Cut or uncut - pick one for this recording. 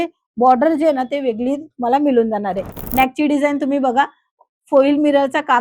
cut